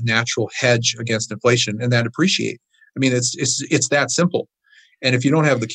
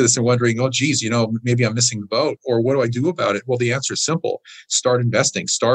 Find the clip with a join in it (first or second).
second